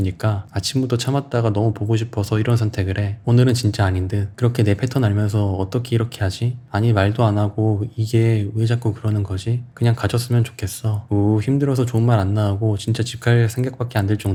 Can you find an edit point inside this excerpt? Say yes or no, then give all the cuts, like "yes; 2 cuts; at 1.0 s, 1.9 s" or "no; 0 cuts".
no; 0 cuts